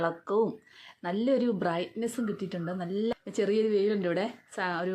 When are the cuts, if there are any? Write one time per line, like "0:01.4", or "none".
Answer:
0:03.1